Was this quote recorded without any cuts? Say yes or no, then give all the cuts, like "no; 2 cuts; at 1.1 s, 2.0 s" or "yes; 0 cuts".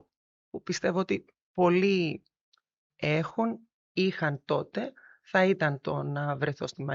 yes; 0 cuts